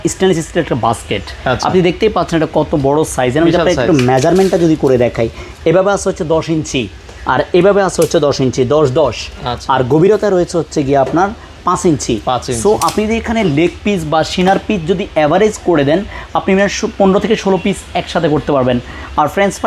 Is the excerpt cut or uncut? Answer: uncut